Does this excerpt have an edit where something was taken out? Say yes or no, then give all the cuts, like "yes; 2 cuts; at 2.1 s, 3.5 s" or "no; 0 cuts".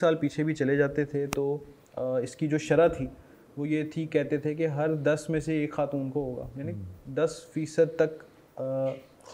no; 0 cuts